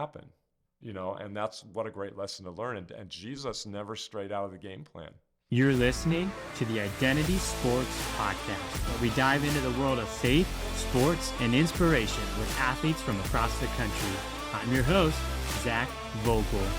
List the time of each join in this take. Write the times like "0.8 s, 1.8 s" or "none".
5.4 s

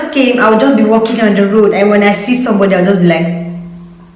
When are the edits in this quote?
none

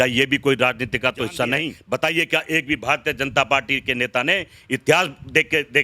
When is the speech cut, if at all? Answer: 1.8 s

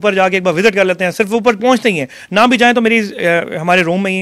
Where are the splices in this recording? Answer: none

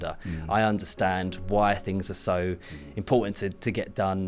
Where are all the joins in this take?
none

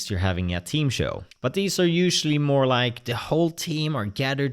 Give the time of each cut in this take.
1.3 s

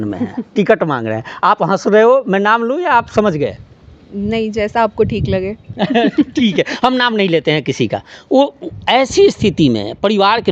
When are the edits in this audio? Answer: none

